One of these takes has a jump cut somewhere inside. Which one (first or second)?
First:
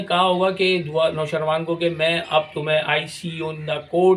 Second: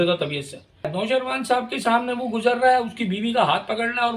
second